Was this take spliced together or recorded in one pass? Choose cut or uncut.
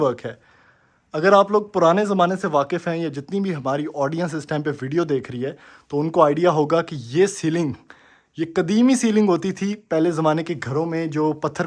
uncut